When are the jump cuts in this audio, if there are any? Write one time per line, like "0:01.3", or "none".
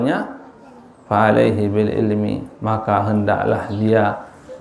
none